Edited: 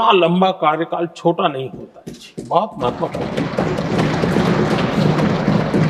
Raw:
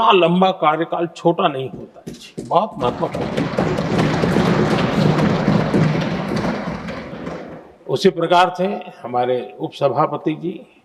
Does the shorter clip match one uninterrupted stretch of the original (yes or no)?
yes